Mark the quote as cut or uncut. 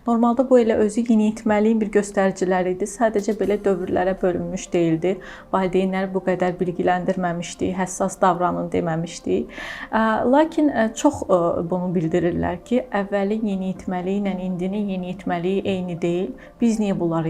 uncut